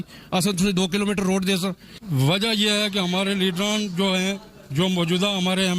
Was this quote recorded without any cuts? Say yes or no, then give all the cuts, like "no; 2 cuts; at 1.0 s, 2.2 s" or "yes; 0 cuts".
no; 1 cut; at 1.9 s